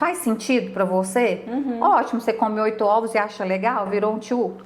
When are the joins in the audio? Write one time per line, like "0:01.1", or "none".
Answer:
none